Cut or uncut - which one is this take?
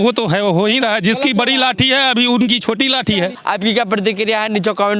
uncut